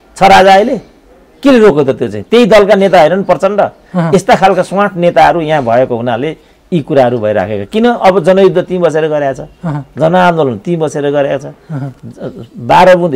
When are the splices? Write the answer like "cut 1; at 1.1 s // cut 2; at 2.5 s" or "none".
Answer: none